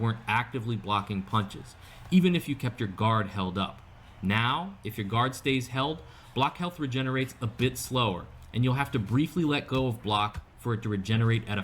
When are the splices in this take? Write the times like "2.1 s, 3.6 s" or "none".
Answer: 4.0 s

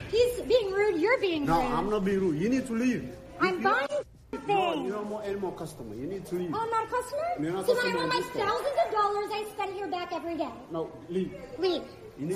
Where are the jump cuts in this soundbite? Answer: 10.4 s

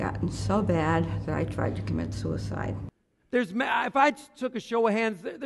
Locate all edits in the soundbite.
2.8 s

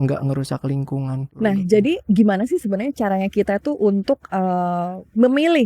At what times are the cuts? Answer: 1.3 s

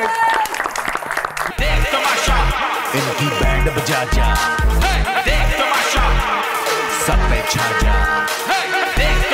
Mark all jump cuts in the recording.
1.5 s

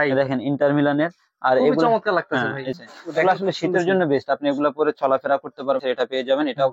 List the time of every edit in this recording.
2.8 s, 5.8 s

